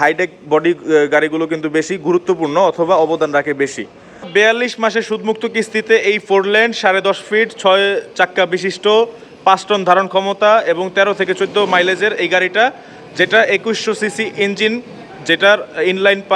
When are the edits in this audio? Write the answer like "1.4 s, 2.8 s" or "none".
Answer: 4.3 s